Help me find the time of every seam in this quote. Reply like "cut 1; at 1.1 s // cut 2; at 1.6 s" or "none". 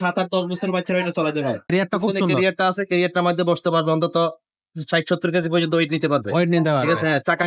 cut 1; at 1.7 s